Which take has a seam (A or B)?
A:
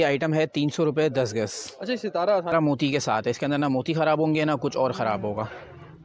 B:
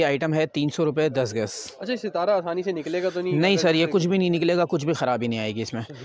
A